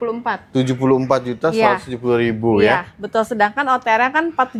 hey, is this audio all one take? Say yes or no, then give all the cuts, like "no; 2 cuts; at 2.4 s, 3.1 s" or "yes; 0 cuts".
yes; 0 cuts